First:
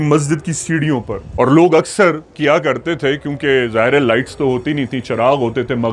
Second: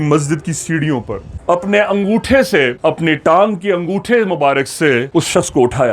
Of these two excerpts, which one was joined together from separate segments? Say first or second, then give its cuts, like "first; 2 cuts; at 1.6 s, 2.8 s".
second; 1 cut; at 1.2 s